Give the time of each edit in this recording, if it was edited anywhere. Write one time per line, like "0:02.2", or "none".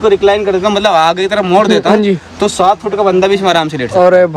none